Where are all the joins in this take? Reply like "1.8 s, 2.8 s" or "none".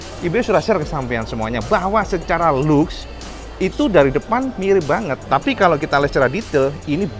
5.3 s